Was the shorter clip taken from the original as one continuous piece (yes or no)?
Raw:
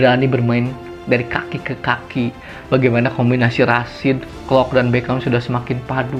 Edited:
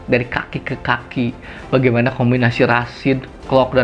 yes